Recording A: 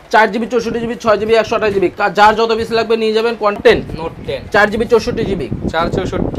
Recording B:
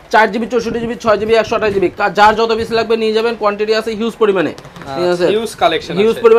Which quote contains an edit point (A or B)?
A